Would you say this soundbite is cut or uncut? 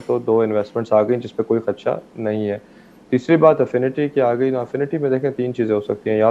uncut